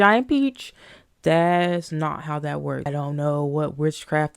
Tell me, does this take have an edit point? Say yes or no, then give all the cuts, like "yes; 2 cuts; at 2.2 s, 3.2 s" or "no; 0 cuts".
yes; 1 cut; at 2.9 s